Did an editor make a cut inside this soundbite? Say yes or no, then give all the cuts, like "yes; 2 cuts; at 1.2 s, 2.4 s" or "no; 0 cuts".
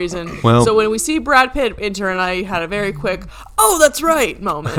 no; 0 cuts